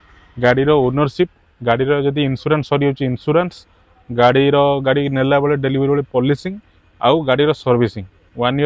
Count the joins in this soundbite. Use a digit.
0